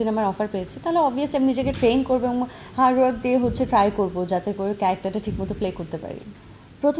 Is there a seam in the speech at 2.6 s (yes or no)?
no